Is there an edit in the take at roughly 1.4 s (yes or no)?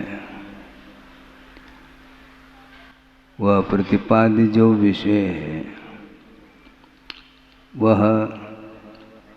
no